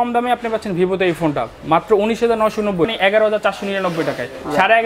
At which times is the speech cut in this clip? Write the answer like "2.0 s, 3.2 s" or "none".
2.9 s